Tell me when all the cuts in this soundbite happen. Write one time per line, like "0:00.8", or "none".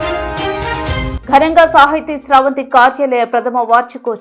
0:01.1